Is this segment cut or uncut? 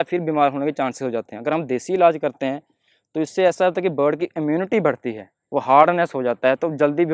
uncut